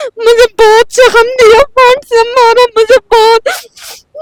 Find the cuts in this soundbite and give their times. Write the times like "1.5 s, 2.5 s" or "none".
none

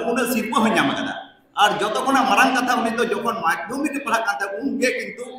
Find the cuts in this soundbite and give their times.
none

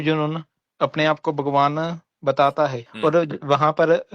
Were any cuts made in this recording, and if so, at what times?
2.8 s

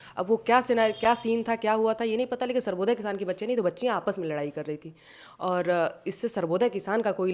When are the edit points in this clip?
none

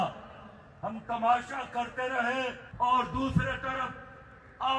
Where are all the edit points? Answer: none

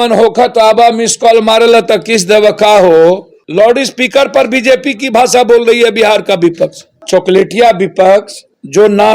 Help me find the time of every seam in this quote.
3.4 s, 7.0 s

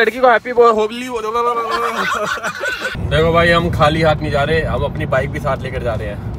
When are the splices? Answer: 3.0 s

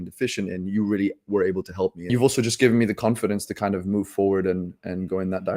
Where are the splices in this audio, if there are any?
2.1 s

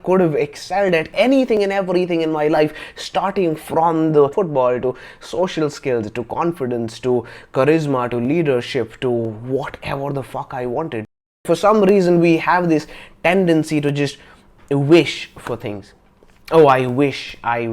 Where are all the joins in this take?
1.1 s, 4.3 s, 11.5 s

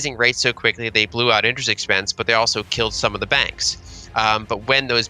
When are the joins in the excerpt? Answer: none

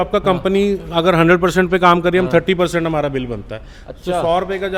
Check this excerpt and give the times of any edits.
none

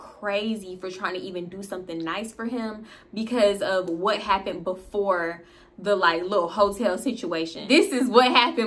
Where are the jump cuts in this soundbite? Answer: 7.6 s

